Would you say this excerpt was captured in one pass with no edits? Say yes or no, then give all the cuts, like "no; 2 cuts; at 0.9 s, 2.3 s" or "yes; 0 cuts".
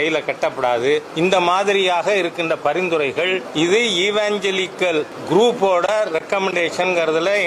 no; 3 cuts; at 1.1 s, 3.5 s, 5.2 s